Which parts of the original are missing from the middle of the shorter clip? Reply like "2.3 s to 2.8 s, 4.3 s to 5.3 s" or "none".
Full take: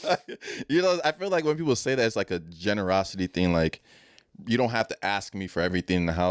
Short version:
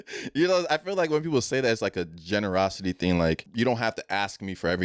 3.8 s to 4.4 s